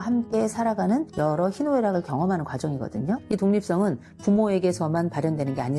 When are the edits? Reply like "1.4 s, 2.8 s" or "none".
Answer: 3.2 s